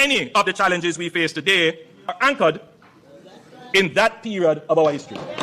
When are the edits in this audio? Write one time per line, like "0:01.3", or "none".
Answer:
0:02.0